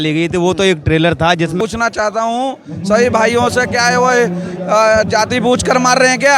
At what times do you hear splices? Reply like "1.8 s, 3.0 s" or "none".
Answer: 1.6 s